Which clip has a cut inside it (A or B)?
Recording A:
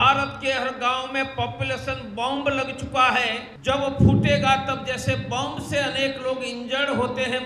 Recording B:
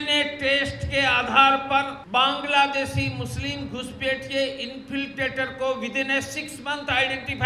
A